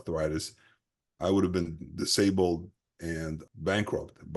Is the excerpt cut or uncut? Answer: cut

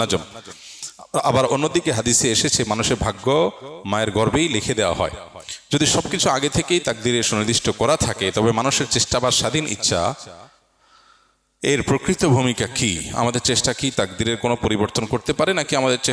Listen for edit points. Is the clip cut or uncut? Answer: uncut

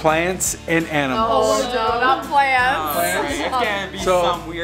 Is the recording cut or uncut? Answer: uncut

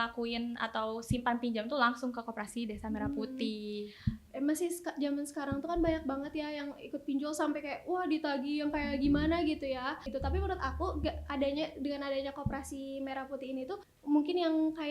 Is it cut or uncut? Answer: cut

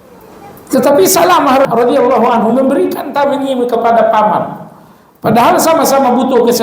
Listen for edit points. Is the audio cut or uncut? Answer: cut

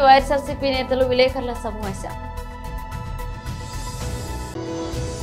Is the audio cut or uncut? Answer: uncut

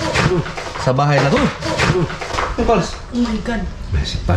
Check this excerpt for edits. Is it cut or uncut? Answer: cut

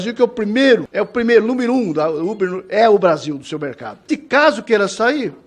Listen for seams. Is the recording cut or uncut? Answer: cut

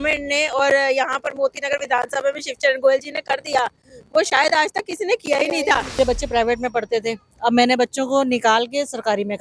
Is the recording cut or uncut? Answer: cut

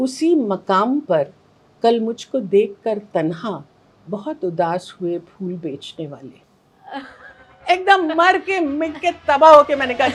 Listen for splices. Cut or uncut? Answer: uncut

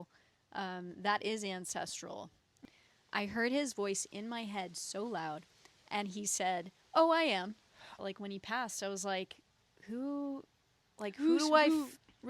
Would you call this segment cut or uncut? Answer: cut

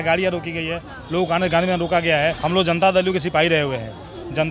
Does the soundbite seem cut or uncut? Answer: cut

